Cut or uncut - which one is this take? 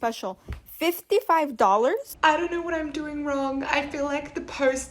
cut